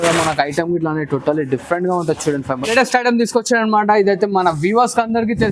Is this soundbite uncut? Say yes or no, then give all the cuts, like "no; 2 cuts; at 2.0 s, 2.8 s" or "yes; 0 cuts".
no; 1 cut; at 2.7 s